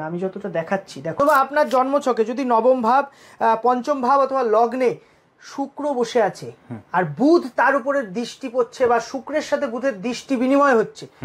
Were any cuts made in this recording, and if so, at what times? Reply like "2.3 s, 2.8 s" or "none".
1.2 s